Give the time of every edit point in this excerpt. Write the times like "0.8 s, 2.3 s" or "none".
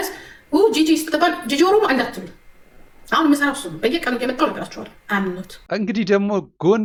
none